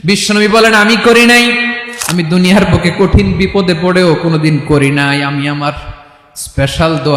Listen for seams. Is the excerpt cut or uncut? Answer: cut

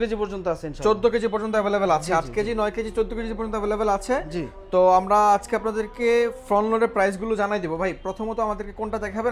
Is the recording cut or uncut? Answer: uncut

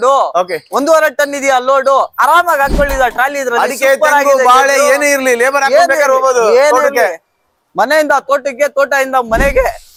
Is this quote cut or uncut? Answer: uncut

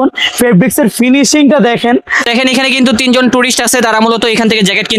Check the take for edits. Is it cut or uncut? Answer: cut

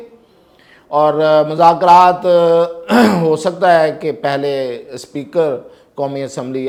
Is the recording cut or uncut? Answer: uncut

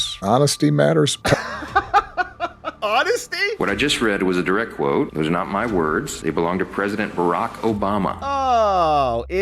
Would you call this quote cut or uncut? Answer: cut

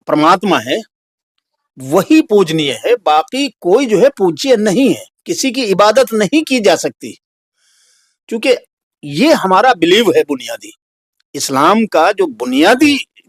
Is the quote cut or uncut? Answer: uncut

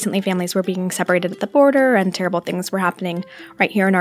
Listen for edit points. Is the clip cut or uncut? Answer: uncut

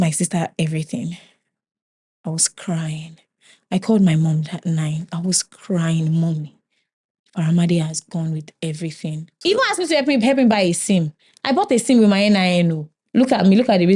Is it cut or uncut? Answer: cut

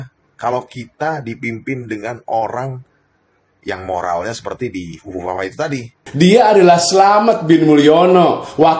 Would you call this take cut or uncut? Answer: cut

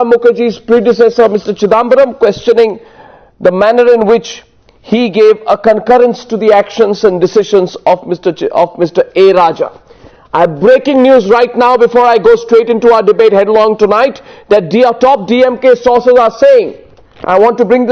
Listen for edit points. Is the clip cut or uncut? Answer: cut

